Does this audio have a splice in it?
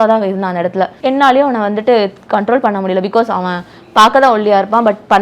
yes; 1 cut; at 0.9 s

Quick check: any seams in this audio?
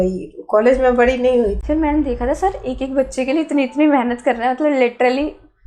yes; 1 cut; at 1.6 s

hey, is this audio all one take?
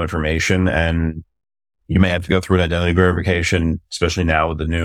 yes; 0 cuts

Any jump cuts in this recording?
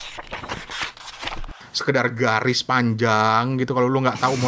yes; 1 cut; at 1.5 s

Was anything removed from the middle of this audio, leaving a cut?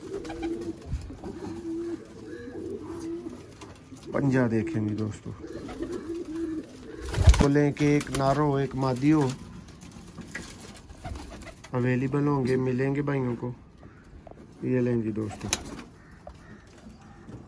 yes; 1 cut; at 7.4 s

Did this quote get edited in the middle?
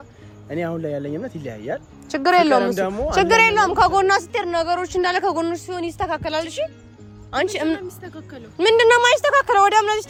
no; 0 cuts

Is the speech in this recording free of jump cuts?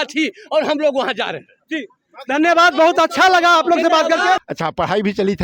no; 1 cut; at 4.5 s

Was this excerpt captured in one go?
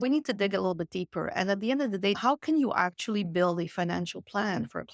no; 1 cut; at 2.2 s

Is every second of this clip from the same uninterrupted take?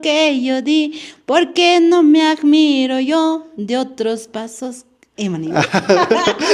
yes; 0 cuts

